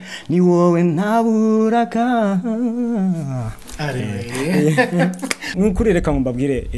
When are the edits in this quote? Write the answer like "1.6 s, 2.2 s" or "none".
5.5 s